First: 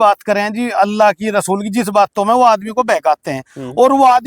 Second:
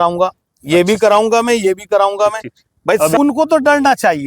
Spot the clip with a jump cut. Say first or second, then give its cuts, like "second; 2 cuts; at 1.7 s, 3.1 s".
second; 1 cut; at 3.2 s